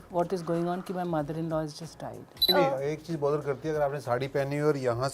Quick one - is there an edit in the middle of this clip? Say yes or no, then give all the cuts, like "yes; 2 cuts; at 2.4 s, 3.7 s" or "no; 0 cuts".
yes; 1 cut; at 2.5 s